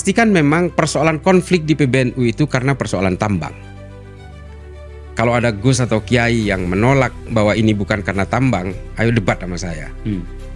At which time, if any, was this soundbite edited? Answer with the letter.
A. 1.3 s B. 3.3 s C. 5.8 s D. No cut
D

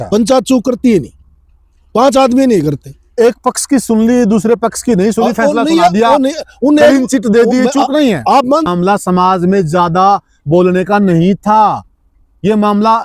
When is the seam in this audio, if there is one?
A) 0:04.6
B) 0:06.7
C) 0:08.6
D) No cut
C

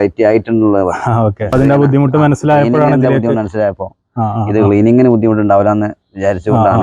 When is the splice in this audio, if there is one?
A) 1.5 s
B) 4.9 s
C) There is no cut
A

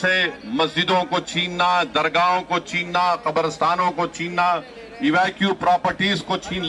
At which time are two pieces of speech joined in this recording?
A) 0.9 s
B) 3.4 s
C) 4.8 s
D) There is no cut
D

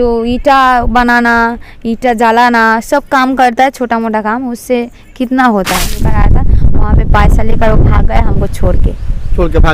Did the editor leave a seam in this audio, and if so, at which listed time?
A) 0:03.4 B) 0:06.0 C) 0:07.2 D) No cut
B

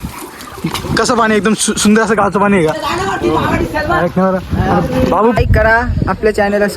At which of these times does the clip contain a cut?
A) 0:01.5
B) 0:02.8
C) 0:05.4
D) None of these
C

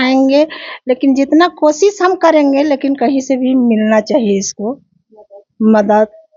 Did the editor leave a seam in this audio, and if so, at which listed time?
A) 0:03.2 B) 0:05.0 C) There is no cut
C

